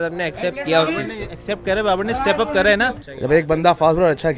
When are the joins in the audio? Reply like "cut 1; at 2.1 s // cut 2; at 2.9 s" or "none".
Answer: cut 1; at 3.0 s